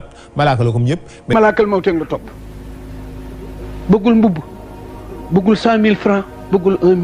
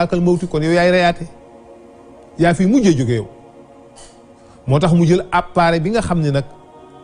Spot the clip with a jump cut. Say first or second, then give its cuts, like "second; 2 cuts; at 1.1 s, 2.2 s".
first; 1 cut; at 1.3 s